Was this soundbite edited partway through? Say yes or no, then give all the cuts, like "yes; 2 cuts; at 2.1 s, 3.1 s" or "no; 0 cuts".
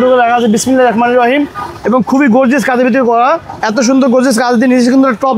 yes; 1 cut; at 3.5 s